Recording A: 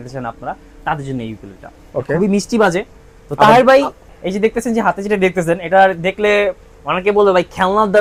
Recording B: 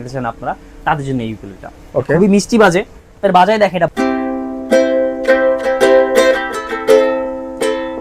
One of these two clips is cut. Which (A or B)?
B